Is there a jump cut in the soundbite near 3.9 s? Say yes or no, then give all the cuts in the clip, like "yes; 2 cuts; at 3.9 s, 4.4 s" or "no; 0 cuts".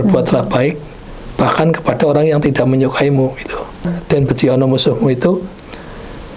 yes; 1 cut; at 3.9 s